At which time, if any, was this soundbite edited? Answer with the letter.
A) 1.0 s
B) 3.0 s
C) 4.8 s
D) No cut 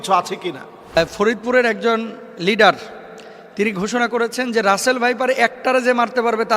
A